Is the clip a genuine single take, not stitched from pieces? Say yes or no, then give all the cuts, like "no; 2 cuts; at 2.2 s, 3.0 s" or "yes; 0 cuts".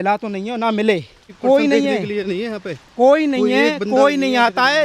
no; 1 cut; at 1.3 s